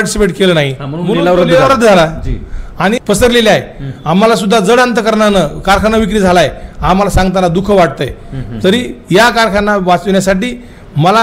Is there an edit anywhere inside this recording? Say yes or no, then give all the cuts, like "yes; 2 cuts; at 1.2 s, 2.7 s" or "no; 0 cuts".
yes; 1 cut; at 3.0 s